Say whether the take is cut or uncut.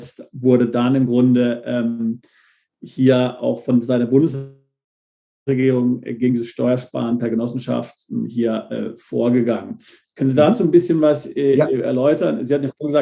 uncut